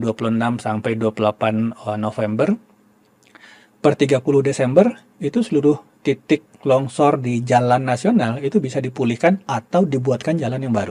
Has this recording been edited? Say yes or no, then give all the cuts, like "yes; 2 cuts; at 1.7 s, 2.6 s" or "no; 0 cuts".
no; 0 cuts